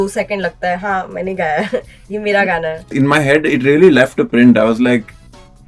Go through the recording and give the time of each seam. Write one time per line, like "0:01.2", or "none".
0:02.9